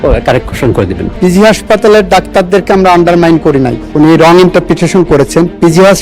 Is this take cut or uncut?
cut